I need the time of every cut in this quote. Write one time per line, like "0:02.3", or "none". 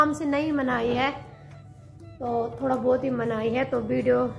none